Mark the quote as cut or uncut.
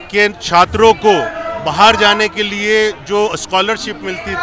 uncut